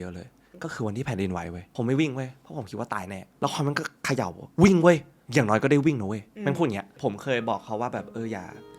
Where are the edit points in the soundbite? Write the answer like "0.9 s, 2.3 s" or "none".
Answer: 1.6 s, 3.2 s, 5.2 s, 6.9 s